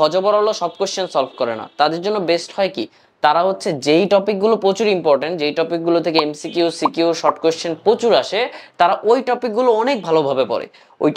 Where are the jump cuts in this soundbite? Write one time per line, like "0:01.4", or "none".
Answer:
none